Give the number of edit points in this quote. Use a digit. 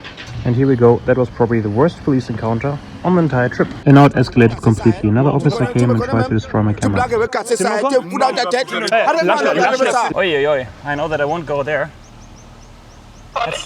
3